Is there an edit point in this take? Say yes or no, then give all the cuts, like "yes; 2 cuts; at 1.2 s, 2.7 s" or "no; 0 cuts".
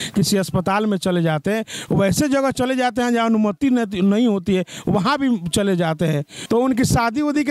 yes; 1 cut; at 6.3 s